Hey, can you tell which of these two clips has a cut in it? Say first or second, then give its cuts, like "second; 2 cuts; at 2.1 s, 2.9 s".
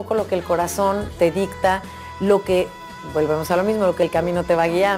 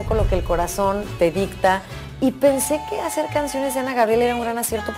first; 1 cut; at 2.0 s